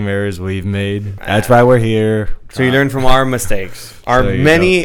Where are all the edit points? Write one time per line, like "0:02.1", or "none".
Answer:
0:01.2
0:02.4